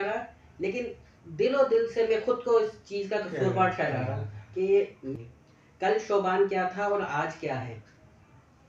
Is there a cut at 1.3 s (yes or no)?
no